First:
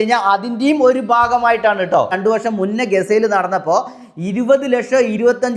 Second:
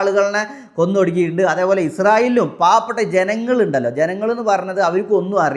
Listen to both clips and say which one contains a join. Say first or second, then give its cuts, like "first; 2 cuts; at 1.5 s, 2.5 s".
first; 1 cut; at 2.2 s